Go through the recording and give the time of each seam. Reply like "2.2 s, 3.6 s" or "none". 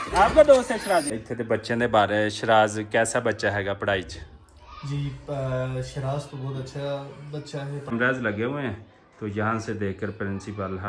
1.3 s, 7.9 s